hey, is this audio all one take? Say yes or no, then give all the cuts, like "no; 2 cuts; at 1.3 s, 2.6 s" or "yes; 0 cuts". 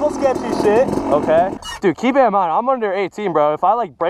no; 1 cut; at 1.7 s